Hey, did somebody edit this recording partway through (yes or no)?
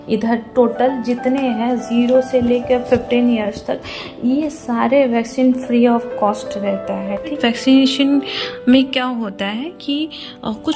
yes